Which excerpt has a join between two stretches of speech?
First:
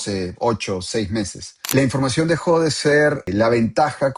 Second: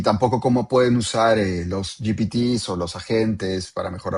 first; 2 cuts; at 1.7 s, 3.2 s

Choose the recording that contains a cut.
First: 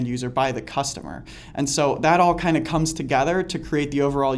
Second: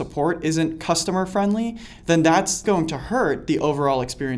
second; 1 cut; at 2.6 s

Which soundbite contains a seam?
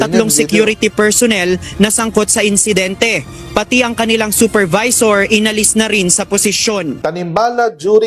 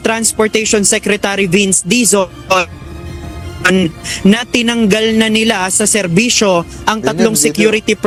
first; 1 cut; at 7.0 s

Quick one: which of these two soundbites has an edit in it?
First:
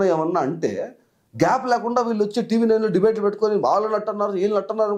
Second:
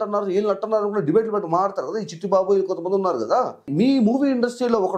second; 1 cut; at 3.7 s

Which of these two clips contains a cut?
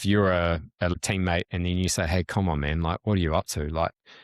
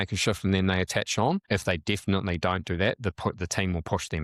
first; 1 cut; at 0.9 s

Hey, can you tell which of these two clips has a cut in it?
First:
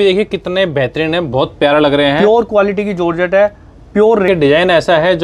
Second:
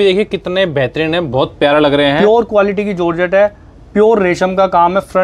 first; 1 cut; at 4.3 s

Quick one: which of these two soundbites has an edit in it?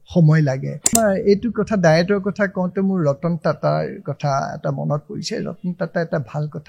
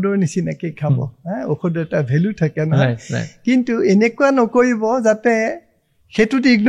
first; 1 cut; at 0.9 s

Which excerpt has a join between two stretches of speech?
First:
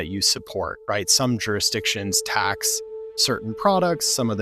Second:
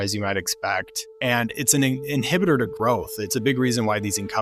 second; 1 cut; at 1.0 s

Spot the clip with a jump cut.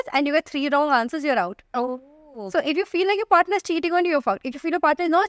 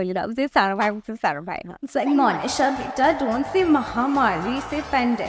second; 1 cut; at 1.7 s

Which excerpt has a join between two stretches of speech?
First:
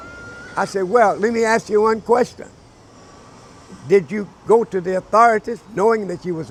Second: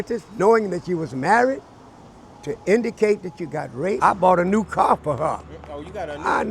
second; 1 cut; at 4.0 s

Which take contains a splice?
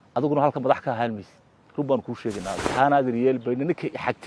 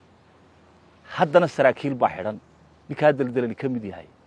first; 1 cut; at 2.6 s

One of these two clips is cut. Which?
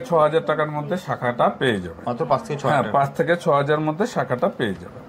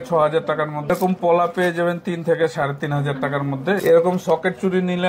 second; 2 cuts; at 0.9 s, 3.8 s

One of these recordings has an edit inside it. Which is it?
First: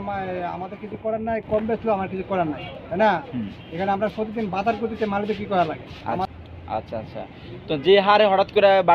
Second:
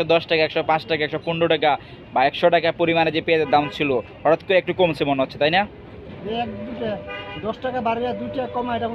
first; 1 cut; at 6.3 s

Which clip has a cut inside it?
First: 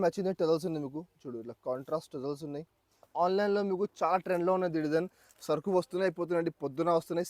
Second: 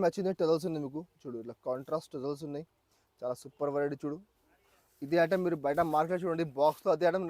first; 1 cut; at 3.1 s

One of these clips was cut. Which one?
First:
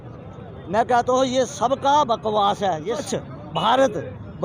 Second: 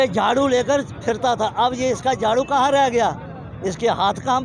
first; 1 cut; at 3.0 s

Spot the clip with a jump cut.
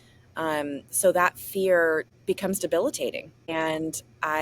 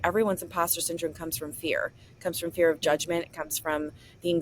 first; 2 cuts; at 2.1 s, 3.3 s

